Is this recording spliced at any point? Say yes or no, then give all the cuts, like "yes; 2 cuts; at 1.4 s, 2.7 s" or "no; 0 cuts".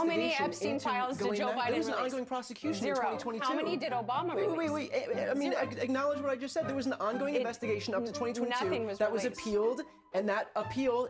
no; 0 cuts